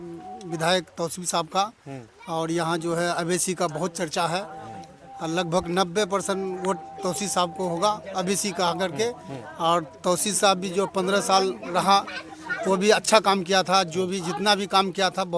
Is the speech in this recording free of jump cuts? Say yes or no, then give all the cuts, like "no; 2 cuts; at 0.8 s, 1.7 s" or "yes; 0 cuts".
yes; 0 cuts